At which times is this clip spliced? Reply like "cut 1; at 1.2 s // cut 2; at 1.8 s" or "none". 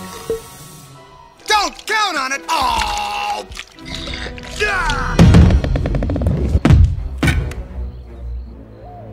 cut 1; at 2.4 s // cut 2; at 4.1 s // cut 3; at 5.7 s